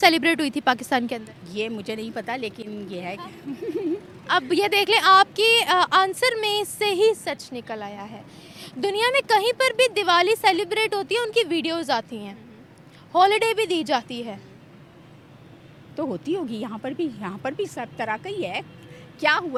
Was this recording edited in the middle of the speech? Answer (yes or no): no